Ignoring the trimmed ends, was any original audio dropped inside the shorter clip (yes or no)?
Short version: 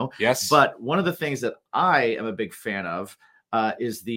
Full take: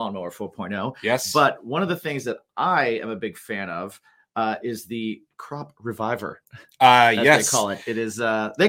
no